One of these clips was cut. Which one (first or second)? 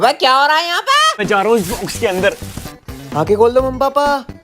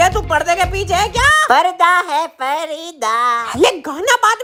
first